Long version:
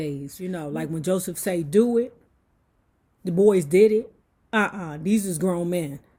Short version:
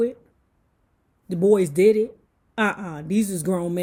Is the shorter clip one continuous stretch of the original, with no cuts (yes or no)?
yes